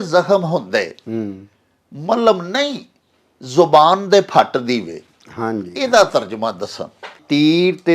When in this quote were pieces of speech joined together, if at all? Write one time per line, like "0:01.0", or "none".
none